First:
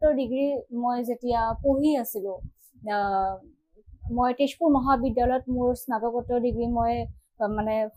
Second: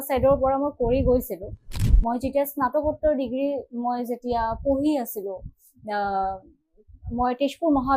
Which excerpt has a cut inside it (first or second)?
second